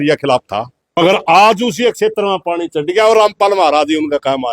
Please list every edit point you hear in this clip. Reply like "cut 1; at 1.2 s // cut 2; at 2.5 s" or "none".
cut 1; at 1.0 s